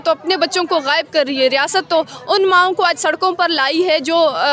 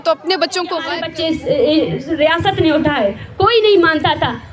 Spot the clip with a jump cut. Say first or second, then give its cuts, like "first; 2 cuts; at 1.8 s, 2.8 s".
second; 1 cut; at 0.9 s